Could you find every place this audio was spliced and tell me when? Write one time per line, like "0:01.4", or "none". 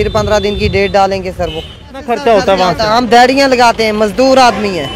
0:02.1